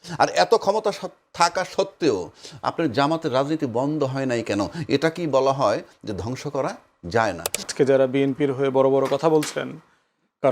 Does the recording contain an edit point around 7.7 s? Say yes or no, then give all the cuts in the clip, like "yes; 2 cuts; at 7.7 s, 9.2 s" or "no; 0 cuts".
yes; 1 cut; at 7.7 s